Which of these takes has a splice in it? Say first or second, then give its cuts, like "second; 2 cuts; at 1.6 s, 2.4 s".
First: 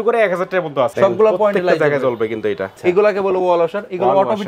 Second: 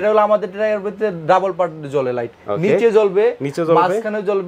first; 2 cuts; at 0.9 s, 2.7 s